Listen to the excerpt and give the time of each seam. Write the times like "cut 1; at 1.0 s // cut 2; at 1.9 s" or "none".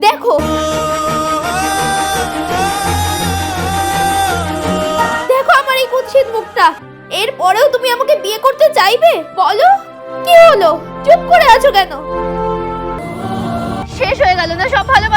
cut 1; at 13.8 s